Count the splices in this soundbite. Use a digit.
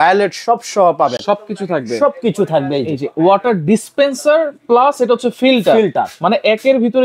0